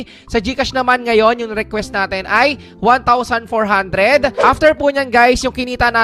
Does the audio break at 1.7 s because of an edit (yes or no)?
no